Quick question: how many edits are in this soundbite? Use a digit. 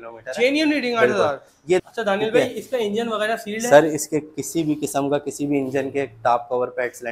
1